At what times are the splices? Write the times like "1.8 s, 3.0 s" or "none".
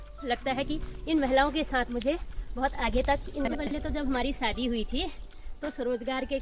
3.6 s